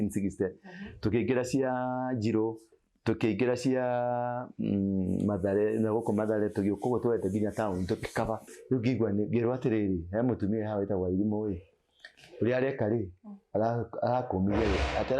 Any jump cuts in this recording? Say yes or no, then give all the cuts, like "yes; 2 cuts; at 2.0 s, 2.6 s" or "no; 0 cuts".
yes; 1 cut; at 8.5 s